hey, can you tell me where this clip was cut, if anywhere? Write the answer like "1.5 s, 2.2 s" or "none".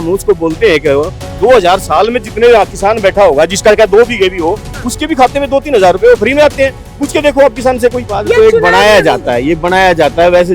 8.0 s